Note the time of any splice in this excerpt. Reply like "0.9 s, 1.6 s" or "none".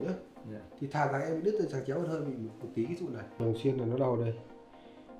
3.4 s